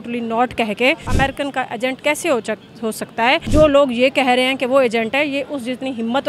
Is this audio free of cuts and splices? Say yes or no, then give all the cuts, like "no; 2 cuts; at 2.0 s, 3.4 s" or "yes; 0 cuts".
no; 2 cuts; at 1.1 s, 3.4 s